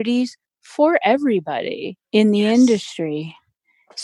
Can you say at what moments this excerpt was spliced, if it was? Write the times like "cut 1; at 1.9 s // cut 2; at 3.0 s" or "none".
cut 1; at 2.0 s